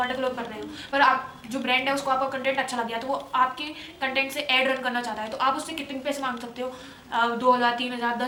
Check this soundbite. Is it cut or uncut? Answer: uncut